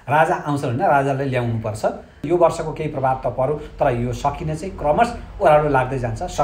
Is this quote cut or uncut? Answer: cut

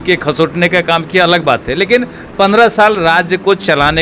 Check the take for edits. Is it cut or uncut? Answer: uncut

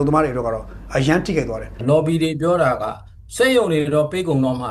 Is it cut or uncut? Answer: cut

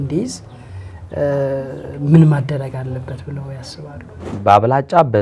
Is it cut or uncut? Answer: cut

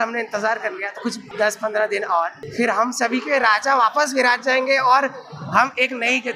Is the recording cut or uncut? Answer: cut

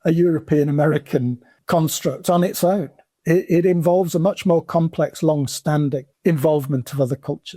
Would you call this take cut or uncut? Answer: cut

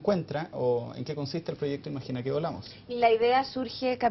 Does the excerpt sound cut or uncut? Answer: uncut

